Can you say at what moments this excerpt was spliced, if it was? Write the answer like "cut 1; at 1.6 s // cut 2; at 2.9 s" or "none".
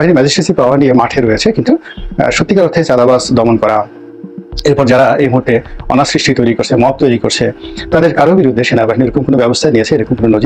none